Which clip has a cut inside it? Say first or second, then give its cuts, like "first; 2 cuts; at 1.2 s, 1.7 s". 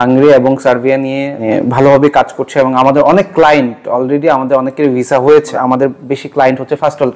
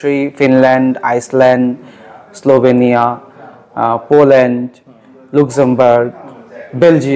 first; 2 cuts; at 1.4 s, 5.5 s